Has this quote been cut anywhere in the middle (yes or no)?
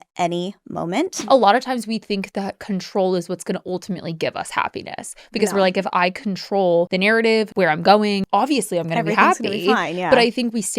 yes